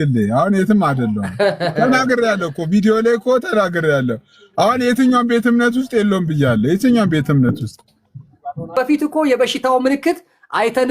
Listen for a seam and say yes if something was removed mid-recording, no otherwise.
yes